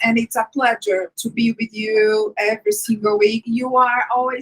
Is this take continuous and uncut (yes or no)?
no